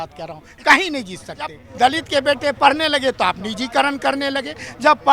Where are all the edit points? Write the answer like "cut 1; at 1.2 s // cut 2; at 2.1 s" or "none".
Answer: cut 1; at 1.6 s